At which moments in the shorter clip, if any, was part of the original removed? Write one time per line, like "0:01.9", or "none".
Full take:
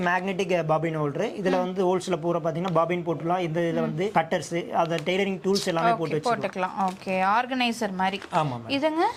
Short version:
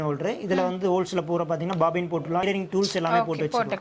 0:02.4